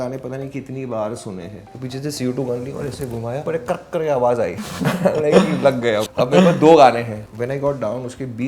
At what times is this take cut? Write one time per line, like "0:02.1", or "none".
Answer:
0:01.6
0:03.4
0:04.6
0:06.1
0:07.2